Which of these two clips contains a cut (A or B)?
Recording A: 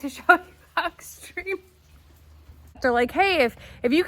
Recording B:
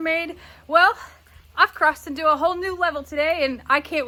A